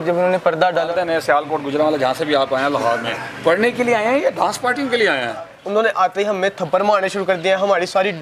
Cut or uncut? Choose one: cut